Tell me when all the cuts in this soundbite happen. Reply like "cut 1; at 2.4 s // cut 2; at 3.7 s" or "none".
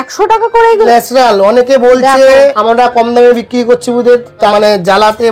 cut 1; at 0.9 s // cut 2; at 2.6 s // cut 3; at 4.5 s